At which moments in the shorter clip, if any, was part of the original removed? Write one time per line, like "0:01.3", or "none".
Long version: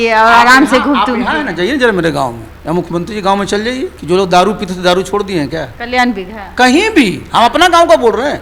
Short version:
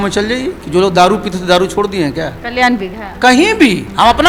none